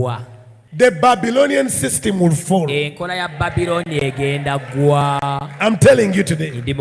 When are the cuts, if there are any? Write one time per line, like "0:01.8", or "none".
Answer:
none